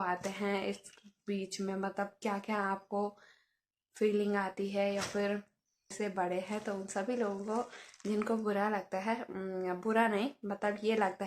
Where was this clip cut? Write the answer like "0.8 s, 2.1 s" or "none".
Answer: 5.9 s